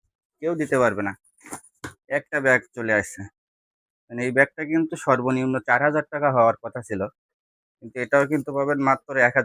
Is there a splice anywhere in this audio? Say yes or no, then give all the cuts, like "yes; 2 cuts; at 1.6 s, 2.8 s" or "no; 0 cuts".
no; 0 cuts